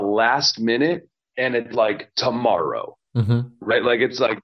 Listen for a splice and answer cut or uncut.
uncut